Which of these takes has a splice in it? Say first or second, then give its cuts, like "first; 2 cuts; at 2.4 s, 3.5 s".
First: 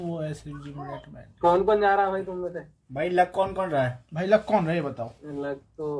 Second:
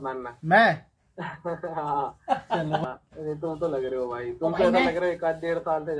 second; 1 cut; at 2.9 s